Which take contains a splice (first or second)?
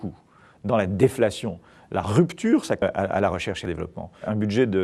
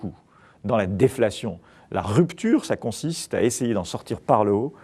second